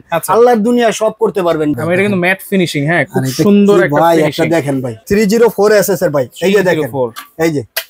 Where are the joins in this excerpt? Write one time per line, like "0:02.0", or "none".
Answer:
0:01.7
0:05.0